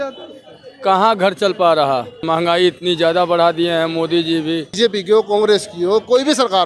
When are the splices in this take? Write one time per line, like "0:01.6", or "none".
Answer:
0:02.2
0:04.7